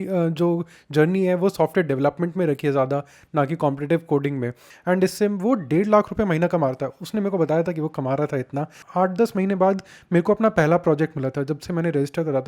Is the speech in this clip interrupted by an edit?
yes; 2 cuts; at 4.7 s, 8.8 s

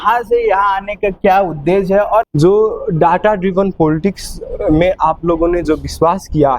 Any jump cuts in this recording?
yes; 1 cut; at 2.3 s

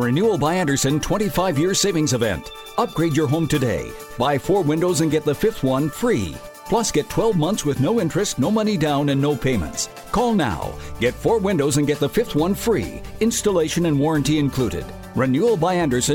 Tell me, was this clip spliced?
no; 0 cuts

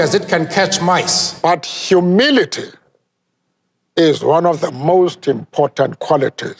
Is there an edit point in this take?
yes; 1 cut; at 1.2 s

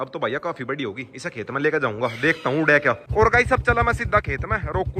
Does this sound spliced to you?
yes; 1 cut; at 3.0 s

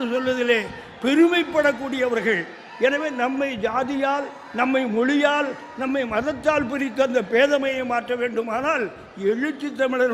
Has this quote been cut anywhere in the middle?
no; 0 cuts

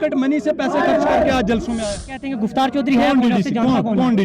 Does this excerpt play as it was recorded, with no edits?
no; 1 cut; at 2.2 s

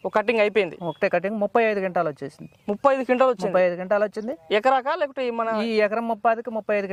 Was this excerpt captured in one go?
yes; 0 cuts

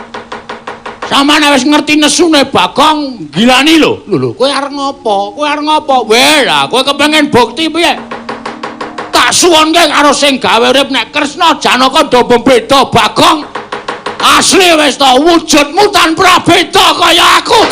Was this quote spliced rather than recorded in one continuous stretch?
yes; 2 cuts; at 2.3 s, 14.5 s

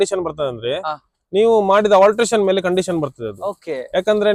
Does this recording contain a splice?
no; 0 cuts

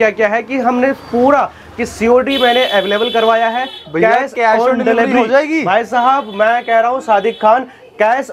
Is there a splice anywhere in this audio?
no; 0 cuts

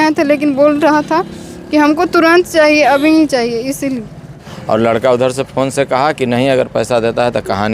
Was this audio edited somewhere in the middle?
yes; 1 cut; at 4.5 s

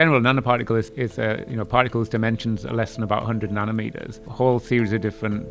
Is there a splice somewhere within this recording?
yes; 2 cuts; at 0.9 s, 4.2 s

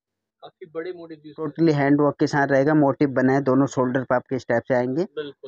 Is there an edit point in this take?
yes; 1 cut; at 1.5 s

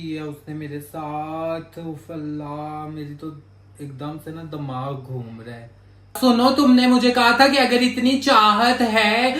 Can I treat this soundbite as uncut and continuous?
no; 1 cut; at 6.1 s

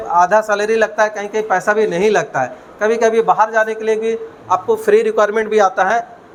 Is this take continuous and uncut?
yes; 0 cuts

